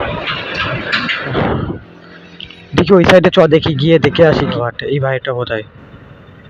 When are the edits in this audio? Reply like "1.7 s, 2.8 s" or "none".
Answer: 1.3 s, 4.5 s